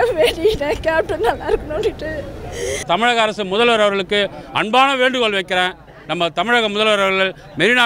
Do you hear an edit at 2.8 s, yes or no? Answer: yes